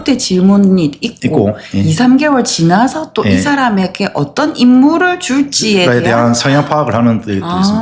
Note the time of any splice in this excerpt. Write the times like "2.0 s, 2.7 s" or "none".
none